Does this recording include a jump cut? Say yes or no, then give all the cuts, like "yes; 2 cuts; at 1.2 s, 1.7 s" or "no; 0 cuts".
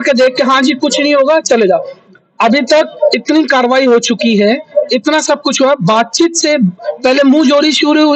no; 0 cuts